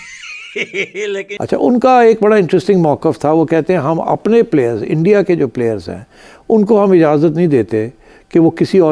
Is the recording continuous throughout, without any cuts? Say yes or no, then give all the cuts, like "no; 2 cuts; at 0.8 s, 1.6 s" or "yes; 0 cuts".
no; 1 cut; at 1.3 s